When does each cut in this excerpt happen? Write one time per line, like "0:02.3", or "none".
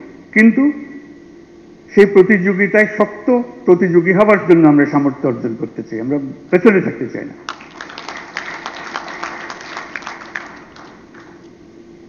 none

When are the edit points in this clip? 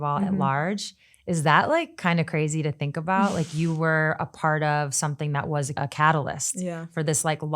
0:05.7

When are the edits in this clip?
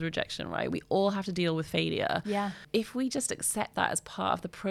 none

